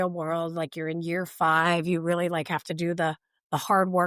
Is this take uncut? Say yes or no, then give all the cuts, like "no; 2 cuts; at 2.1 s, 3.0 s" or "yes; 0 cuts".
yes; 0 cuts